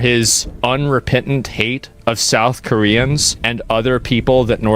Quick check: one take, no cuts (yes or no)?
yes